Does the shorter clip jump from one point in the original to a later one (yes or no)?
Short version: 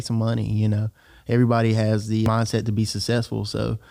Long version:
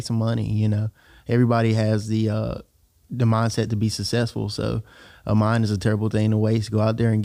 yes